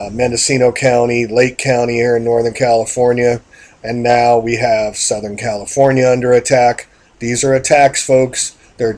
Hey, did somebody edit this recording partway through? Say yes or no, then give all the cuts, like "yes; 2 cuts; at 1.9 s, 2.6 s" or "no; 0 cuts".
yes; 1 cut; at 1.4 s